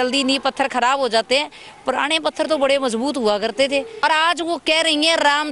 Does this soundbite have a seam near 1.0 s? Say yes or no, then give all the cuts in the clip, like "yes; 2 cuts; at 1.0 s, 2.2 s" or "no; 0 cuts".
no; 1 cut; at 4.0 s